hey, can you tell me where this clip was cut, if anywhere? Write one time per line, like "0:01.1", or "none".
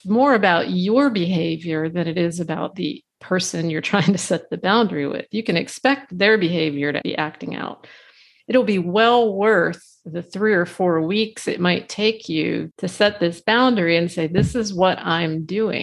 0:07.0
0:08.3
0:12.7